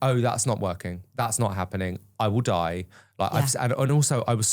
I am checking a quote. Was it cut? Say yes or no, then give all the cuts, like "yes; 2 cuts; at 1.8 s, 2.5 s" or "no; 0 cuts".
no; 0 cuts